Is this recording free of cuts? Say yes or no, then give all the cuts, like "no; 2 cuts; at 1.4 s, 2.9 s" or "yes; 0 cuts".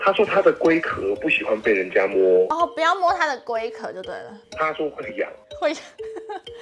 yes; 0 cuts